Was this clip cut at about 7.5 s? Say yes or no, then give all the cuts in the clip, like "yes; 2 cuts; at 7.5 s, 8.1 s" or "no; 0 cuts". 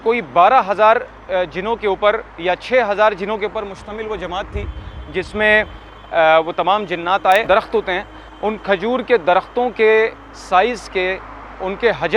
yes; 1 cut; at 7.5 s